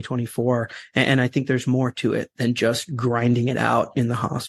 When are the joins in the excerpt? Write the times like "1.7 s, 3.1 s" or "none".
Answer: none